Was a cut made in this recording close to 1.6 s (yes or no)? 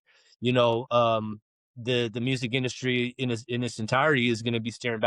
no